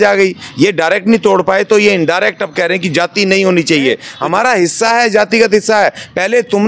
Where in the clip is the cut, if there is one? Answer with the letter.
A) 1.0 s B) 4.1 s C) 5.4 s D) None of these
B